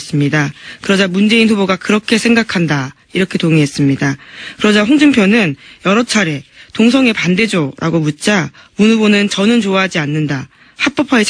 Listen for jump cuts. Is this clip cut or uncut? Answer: cut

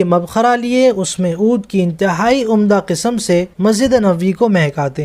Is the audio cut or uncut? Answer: cut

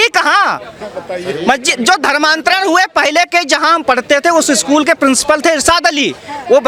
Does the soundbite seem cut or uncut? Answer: uncut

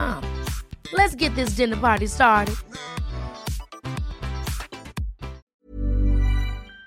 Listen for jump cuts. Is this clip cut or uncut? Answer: cut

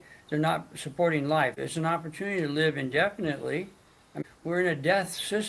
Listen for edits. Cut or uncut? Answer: cut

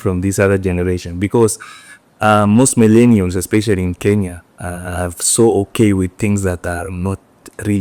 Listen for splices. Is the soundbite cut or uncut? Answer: uncut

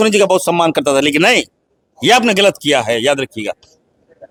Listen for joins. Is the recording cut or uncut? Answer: uncut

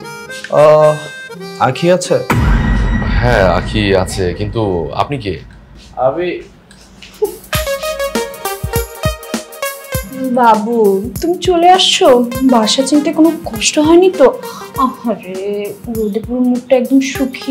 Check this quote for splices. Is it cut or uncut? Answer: uncut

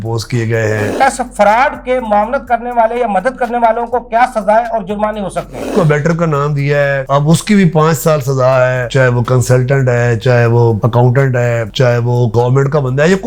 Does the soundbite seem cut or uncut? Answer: cut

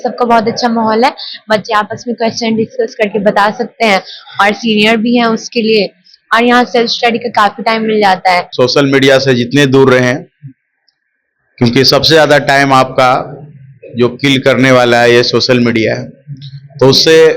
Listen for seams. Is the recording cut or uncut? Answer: cut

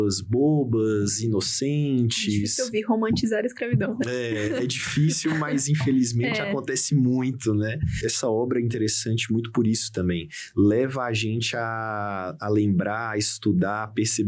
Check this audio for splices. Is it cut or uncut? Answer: cut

